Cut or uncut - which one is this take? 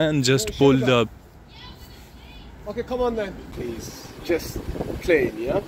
cut